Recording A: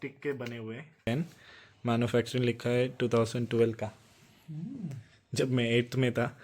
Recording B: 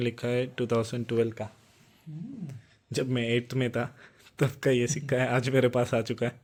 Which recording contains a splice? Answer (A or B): A